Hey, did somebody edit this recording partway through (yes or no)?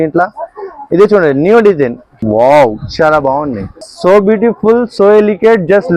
yes